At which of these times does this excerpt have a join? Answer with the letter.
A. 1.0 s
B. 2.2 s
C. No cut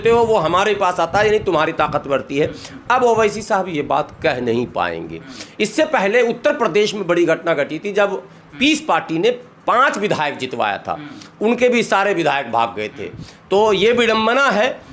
C